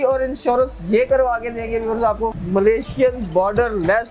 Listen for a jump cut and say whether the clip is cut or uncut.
cut